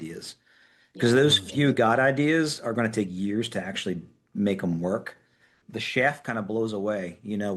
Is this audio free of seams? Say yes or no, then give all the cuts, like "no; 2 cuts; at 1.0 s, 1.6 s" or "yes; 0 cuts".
no; 1 cut; at 5.6 s